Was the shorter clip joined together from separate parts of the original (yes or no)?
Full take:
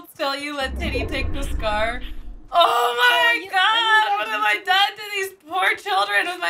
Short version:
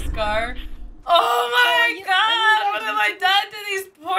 no